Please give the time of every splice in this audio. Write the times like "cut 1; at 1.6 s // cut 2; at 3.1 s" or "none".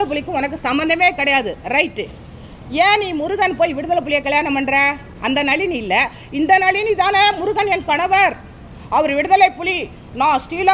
none